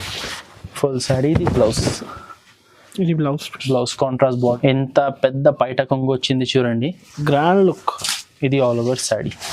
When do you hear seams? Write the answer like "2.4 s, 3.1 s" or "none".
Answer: 4.6 s